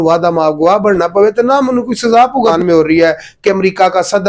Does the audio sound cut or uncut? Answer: cut